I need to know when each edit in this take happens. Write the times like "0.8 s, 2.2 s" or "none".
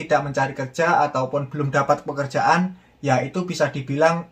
none